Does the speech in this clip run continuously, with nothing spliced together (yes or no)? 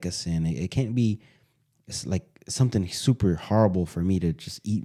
yes